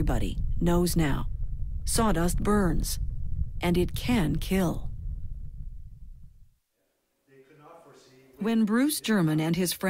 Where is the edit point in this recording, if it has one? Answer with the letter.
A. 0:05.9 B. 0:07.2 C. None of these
C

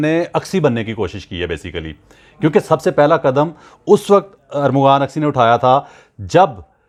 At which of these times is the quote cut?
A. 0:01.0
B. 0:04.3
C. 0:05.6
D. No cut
D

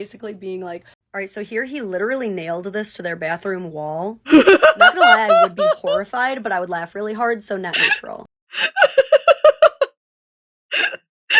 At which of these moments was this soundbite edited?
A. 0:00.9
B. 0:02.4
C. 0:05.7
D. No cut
A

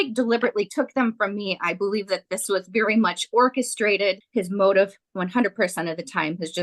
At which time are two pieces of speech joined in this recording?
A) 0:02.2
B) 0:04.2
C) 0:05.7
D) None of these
B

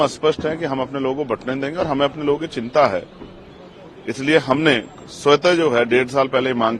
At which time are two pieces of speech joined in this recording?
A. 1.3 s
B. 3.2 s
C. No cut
C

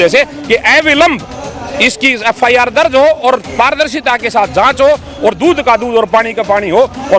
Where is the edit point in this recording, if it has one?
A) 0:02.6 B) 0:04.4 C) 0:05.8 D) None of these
D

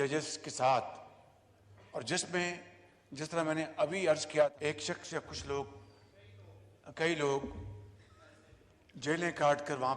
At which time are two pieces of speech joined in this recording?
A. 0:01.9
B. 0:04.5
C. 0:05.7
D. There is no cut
B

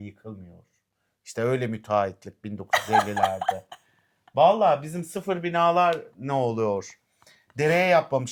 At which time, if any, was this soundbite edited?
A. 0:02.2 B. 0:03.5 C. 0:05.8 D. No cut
D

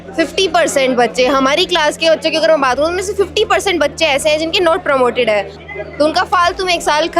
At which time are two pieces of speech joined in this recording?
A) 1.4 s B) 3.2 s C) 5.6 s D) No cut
C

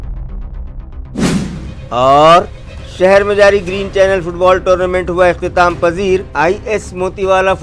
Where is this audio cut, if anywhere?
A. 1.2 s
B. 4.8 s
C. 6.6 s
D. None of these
A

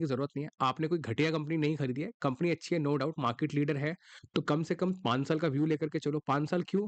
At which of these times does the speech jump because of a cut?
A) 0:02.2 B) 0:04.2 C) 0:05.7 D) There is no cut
B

